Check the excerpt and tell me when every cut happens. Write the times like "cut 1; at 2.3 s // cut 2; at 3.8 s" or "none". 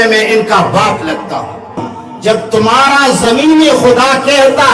cut 1; at 1.9 s